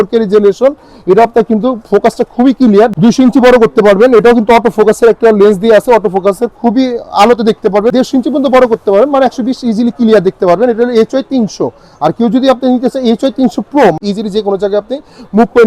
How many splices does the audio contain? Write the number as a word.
three